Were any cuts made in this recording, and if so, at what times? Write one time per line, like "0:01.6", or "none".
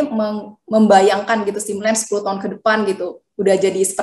none